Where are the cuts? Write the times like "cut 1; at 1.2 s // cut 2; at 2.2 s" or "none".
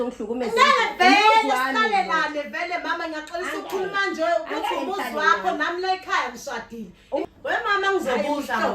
cut 1; at 7.3 s

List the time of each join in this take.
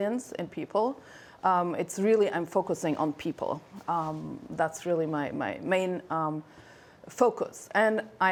none

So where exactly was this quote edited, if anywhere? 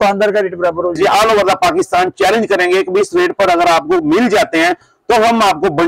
cut 1; at 1.0 s

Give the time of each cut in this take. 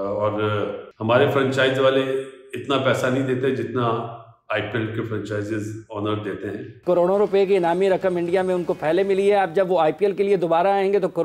cut 1; at 6.7 s

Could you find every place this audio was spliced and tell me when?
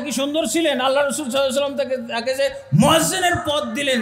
none

